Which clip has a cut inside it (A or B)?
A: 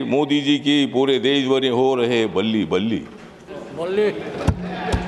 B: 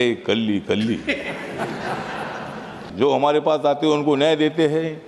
B